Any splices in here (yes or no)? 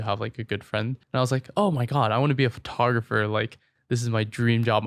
yes